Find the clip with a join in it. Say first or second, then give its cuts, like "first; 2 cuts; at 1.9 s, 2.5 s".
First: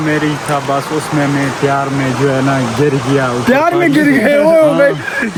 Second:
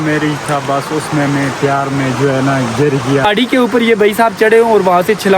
second; 1 cut; at 3.2 s